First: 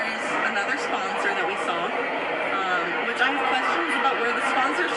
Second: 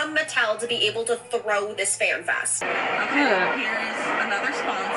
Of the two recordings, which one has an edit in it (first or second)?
second